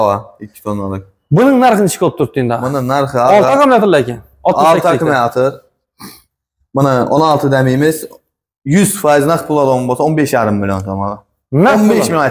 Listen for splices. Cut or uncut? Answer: uncut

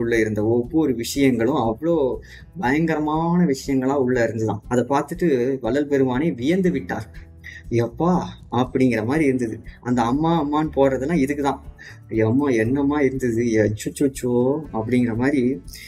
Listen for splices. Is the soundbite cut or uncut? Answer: uncut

